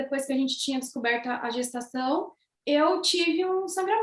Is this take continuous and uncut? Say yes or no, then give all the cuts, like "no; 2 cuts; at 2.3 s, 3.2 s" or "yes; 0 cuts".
yes; 0 cuts